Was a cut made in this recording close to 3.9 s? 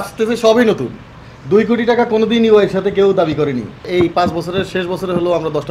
yes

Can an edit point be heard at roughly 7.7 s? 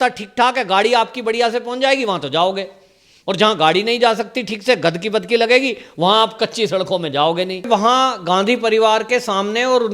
yes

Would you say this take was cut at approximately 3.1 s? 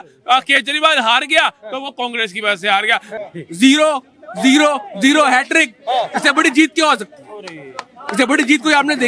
yes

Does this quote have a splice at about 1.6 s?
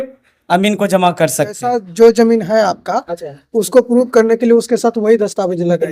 yes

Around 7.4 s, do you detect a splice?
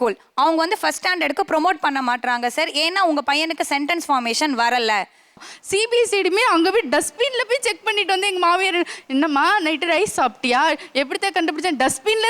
no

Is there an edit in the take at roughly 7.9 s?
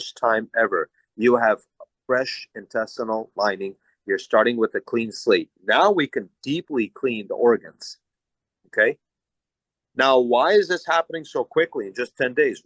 no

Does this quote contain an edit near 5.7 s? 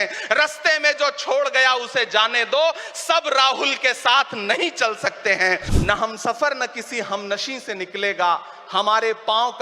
yes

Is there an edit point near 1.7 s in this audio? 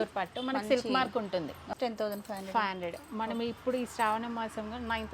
yes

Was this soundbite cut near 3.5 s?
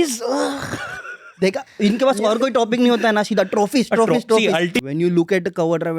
no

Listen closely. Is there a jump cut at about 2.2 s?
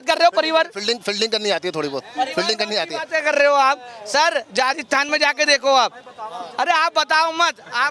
no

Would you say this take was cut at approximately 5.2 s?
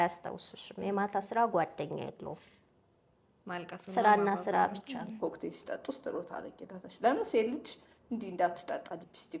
yes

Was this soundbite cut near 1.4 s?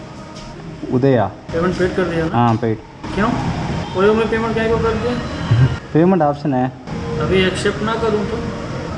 yes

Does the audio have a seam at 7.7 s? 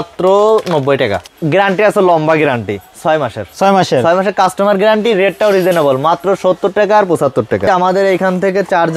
yes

